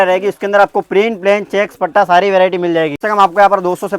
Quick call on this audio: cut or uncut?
cut